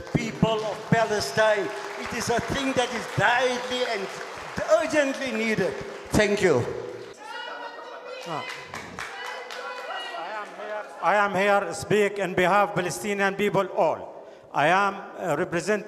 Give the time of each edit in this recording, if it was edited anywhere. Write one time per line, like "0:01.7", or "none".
0:07.1